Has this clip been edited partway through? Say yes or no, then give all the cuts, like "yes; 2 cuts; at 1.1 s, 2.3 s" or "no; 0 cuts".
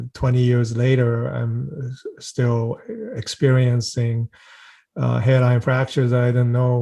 no; 0 cuts